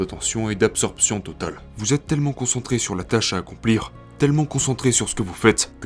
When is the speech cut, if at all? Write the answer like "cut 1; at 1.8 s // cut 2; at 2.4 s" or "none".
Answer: cut 1; at 1.7 s // cut 2; at 4.0 s